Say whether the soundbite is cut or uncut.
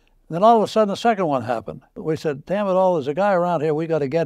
uncut